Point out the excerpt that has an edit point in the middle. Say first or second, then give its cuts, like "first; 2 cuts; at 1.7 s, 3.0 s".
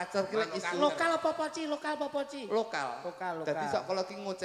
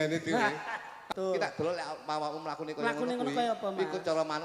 second; 1 cut; at 1.1 s